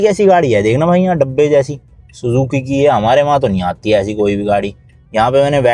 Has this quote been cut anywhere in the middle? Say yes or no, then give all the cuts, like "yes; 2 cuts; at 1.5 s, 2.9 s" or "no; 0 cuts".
no; 0 cuts